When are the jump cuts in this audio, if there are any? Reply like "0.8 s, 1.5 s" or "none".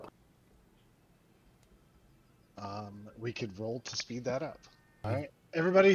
5.0 s